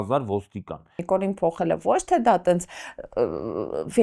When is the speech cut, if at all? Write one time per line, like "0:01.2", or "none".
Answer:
0:01.0